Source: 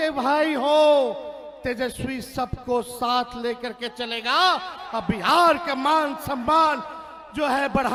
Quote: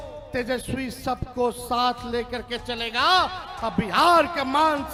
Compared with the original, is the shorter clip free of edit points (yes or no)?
yes